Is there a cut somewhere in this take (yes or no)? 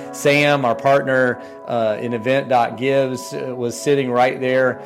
no